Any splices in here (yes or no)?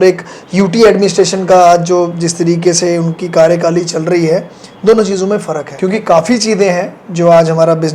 yes